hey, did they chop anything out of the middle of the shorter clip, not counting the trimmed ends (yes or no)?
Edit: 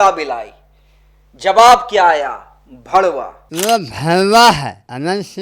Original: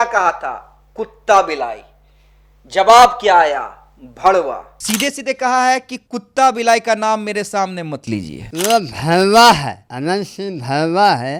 yes